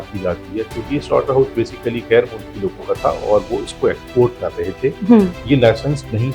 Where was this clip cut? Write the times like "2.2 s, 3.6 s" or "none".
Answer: none